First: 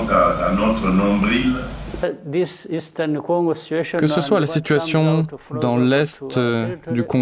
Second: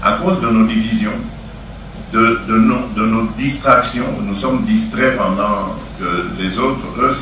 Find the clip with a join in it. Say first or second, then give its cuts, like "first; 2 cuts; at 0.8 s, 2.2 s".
first; 1 cut; at 1.8 s